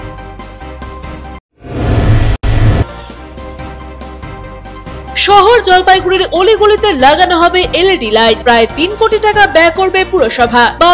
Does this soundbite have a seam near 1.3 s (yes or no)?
yes